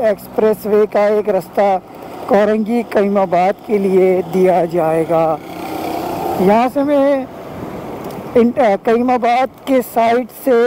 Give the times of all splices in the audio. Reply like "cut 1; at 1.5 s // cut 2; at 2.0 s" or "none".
none